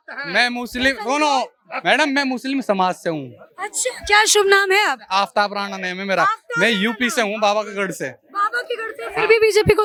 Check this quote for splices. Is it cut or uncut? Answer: uncut